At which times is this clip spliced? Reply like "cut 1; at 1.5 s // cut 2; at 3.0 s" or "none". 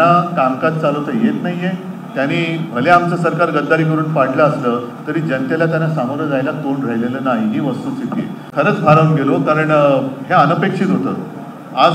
cut 1; at 8.6 s